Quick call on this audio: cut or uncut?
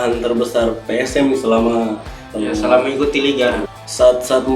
cut